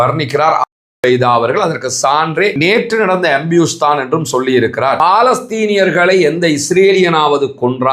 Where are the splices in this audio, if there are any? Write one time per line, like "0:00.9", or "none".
0:02.3
0:05.0